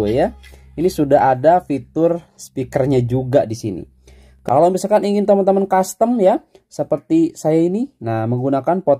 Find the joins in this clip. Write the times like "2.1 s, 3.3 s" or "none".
4.3 s